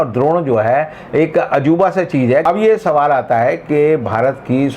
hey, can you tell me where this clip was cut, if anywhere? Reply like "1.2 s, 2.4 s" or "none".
2.4 s